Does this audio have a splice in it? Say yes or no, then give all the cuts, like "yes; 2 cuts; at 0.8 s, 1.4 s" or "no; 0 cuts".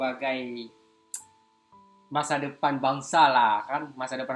no; 0 cuts